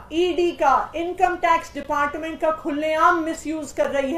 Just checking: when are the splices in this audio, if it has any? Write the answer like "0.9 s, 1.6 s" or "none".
none